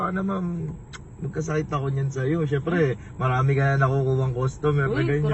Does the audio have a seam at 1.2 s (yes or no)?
no